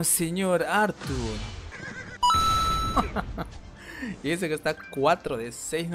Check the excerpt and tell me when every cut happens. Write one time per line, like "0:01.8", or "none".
0:01.7